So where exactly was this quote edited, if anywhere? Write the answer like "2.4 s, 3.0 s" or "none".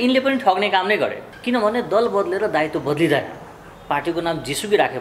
1.2 s